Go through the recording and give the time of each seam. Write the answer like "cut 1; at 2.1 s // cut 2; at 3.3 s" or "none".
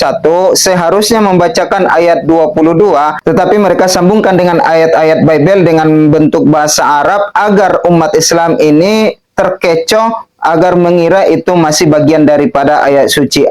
none